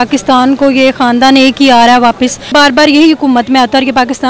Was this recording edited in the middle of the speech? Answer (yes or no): no